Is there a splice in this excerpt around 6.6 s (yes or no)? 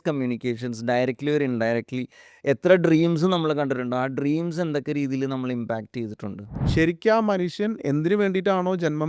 yes